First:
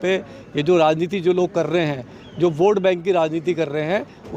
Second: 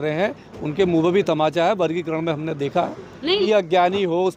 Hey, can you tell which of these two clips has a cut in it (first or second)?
second